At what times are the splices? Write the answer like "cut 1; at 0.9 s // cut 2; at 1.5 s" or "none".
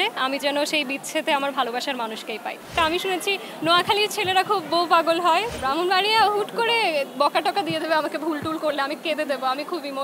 cut 1; at 2.8 s // cut 2; at 5.5 s